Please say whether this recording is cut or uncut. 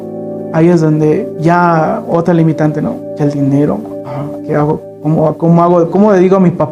uncut